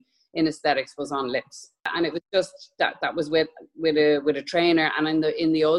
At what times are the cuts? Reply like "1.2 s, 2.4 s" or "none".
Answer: 1.9 s

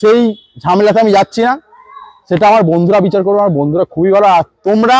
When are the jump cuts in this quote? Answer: none

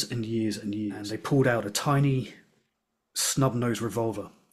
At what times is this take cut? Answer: 1.1 s

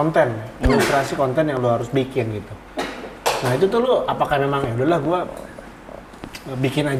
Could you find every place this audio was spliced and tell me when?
none

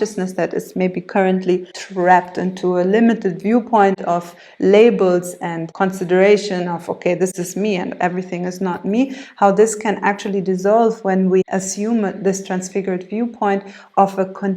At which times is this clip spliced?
1.8 s, 5.7 s, 7.4 s, 11.5 s

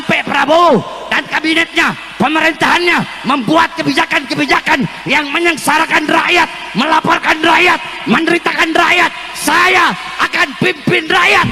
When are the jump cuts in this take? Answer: none

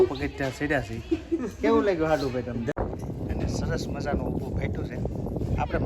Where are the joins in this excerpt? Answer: 2.8 s

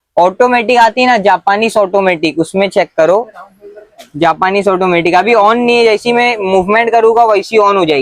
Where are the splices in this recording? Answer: none

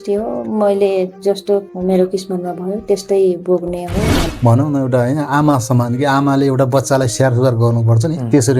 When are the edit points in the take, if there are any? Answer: 1.7 s, 4.2 s

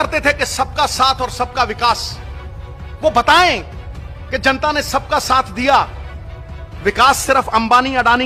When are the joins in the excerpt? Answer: none

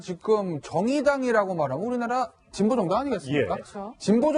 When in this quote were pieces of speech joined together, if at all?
1.0 s

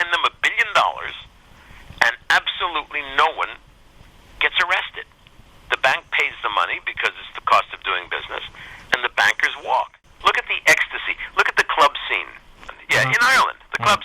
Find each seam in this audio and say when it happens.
10.0 s, 12.6 s

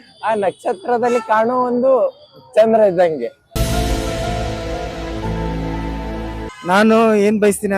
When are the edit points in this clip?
6.5 s

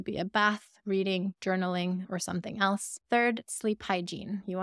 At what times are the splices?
2.9 s

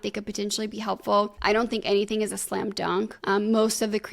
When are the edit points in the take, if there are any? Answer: 1.3 s, 3.2 s

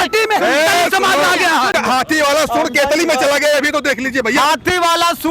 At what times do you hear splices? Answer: 1.7 s

